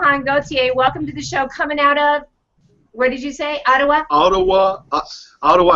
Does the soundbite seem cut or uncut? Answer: cut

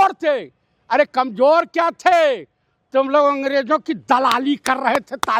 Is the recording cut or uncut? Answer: uncut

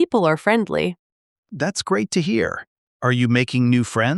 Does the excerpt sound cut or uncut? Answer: cut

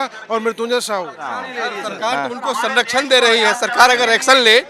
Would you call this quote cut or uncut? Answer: cut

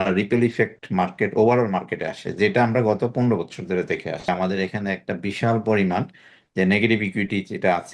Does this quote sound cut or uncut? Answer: cut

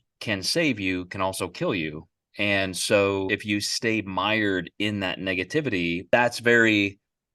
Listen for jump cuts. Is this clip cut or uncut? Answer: cut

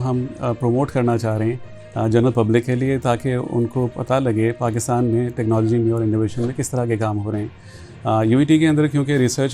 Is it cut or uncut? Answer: uncut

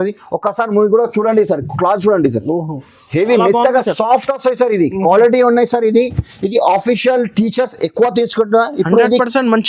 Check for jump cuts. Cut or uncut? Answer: uncut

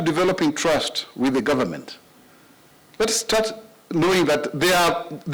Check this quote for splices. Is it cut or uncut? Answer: uncut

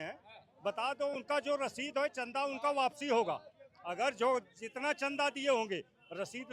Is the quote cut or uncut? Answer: uncut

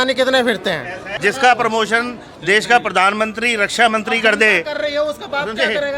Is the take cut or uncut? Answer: cut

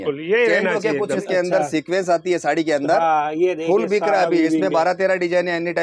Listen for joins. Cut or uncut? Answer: cut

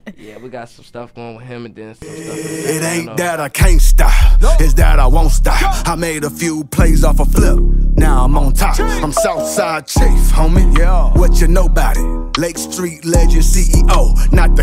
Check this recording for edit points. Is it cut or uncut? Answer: cut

